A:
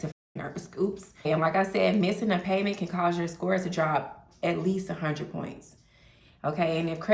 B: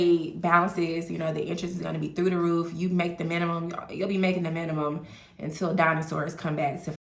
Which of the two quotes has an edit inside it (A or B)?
A